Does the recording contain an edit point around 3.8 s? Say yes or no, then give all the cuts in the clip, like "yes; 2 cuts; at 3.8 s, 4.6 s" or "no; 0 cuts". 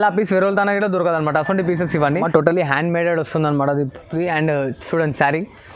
no; 1 cut; at 2.2 s